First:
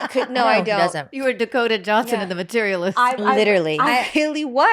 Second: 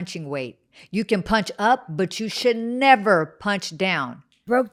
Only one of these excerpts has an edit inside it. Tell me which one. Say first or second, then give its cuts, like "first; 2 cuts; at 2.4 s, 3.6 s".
first; 1 cut; at 1.1 s